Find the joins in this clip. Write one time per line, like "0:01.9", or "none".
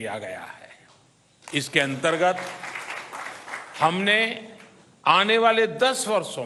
none